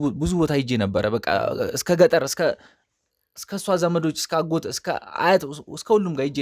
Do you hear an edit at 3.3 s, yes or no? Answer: no